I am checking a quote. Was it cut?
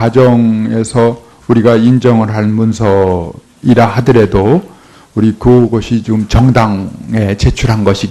yes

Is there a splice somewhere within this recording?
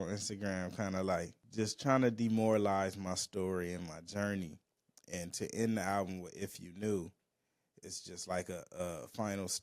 yes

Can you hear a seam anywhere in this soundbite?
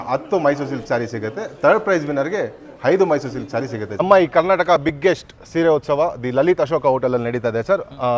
yes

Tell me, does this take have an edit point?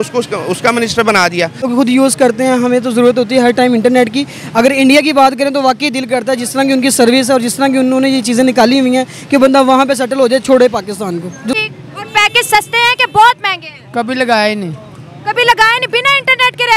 yes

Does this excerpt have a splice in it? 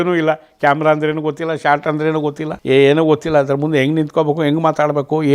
yes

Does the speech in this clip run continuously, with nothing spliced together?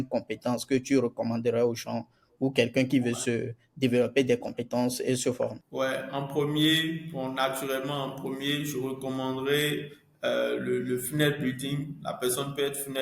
yes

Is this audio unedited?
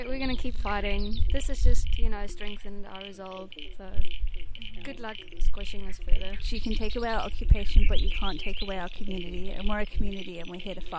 no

